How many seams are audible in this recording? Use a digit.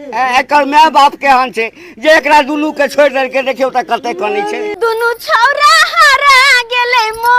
1